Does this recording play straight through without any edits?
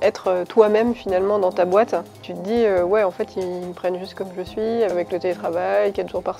no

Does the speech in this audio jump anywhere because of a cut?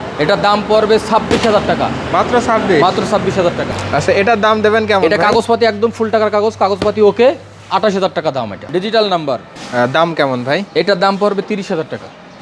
yes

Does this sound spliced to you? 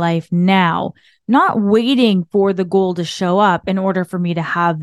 no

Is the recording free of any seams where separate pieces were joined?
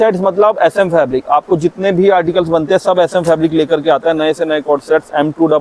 yes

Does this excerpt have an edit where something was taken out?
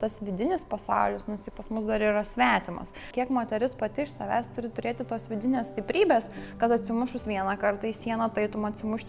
yes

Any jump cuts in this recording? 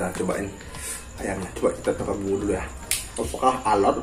no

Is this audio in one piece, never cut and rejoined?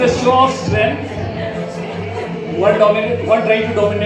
yes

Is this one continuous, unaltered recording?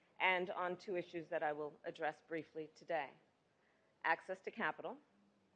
yes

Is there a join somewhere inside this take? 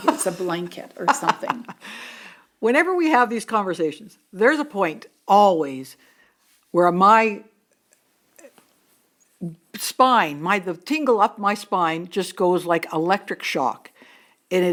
no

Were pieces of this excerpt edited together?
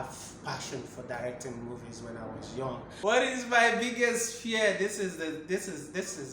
yes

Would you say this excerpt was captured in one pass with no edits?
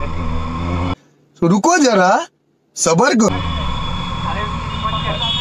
yes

